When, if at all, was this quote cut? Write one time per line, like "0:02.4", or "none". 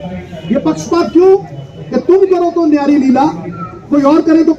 none